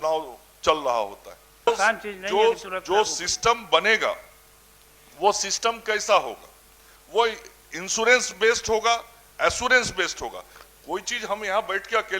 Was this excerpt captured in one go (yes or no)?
no